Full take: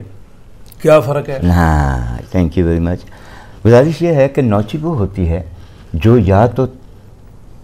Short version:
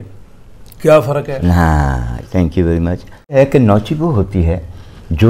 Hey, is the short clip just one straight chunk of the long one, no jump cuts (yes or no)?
no